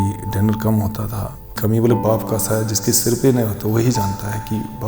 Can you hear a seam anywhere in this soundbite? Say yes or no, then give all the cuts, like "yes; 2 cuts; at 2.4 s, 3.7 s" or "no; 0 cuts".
yes; 1 cut; at 1.6 s